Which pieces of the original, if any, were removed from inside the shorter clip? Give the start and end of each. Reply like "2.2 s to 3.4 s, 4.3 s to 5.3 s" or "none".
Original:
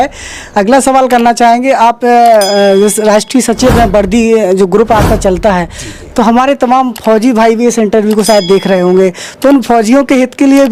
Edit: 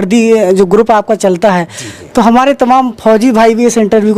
none